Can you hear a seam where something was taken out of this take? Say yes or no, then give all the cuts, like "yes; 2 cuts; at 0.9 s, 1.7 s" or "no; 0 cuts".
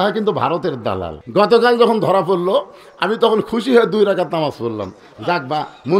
yes; 1 cut; at 1.1 s